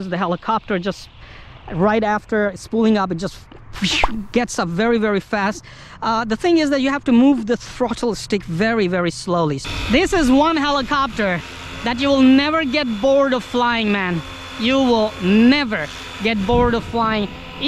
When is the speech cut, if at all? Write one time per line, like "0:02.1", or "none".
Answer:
0:09.6